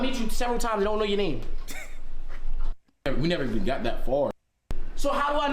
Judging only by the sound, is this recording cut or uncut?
uncut